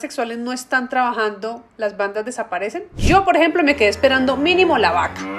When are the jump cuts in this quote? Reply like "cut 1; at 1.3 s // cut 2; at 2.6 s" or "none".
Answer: cut 1; at 2.9 s